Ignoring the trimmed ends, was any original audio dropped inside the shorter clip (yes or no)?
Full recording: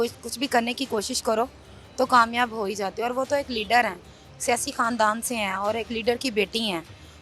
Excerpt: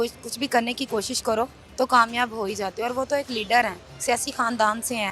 yes